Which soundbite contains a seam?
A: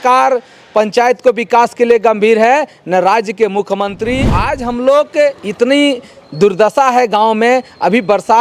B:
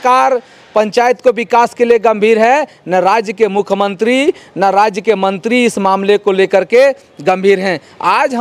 A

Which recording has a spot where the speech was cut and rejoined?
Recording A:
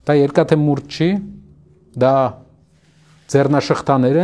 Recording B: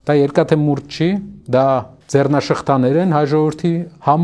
B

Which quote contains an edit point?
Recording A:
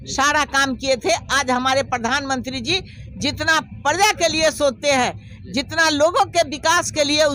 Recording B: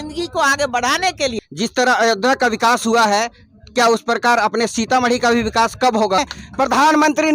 B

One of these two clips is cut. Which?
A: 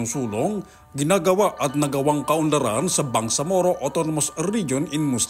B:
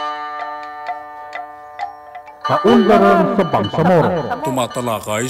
B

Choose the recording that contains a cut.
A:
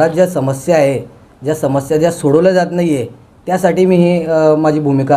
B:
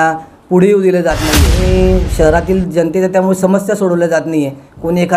B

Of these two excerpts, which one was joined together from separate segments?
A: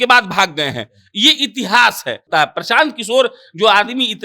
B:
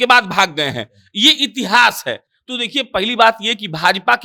A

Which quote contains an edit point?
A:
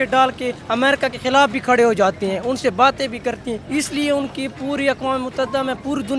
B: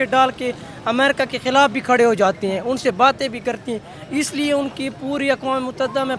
A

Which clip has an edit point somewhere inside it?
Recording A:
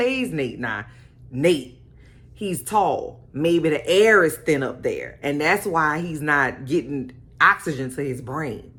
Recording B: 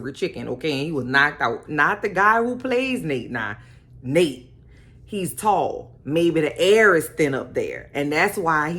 B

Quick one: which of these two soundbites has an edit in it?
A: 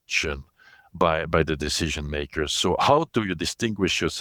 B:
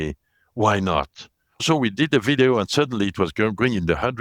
B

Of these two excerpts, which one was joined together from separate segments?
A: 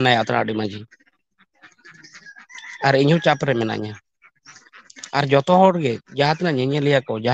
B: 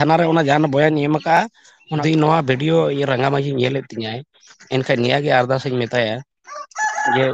B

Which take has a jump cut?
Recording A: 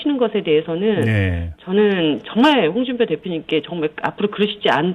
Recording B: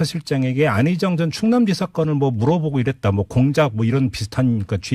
A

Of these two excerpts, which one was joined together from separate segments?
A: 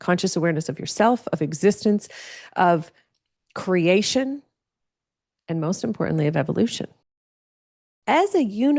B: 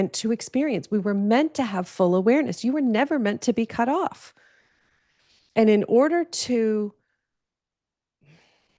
A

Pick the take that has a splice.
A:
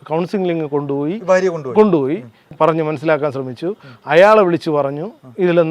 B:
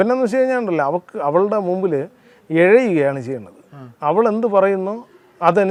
A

